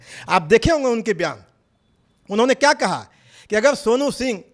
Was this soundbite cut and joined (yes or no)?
no